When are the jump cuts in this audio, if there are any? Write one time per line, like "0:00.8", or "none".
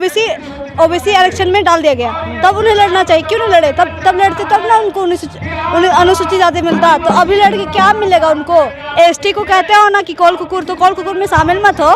0:08.8